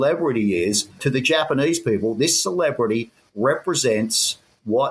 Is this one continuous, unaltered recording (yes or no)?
no